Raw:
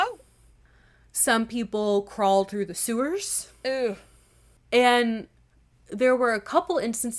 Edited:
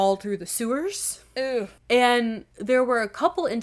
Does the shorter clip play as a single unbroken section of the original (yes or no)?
no